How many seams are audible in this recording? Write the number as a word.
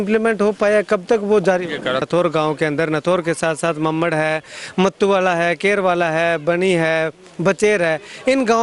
one